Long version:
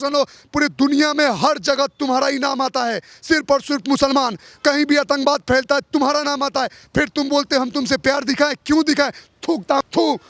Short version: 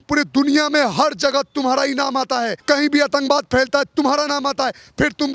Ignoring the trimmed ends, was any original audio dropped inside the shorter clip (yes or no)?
yes